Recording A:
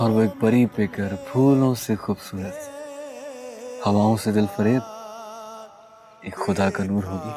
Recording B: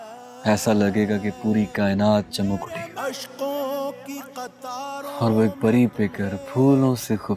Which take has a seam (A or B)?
B